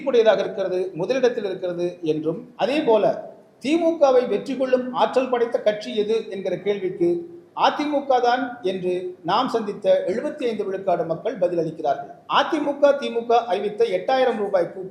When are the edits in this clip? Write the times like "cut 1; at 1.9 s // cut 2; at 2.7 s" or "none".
cut 1; at 2.5 s // cut 2; at 12.1 s